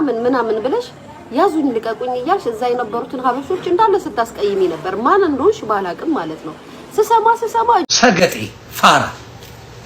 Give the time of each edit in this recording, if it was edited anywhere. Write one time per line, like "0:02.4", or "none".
0:07.9